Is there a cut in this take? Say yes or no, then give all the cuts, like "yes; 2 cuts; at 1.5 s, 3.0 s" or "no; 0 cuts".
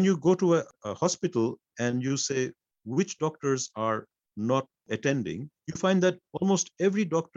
no; 0 cuts